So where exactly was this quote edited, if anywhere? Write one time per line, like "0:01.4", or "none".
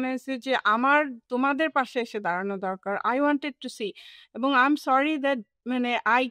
none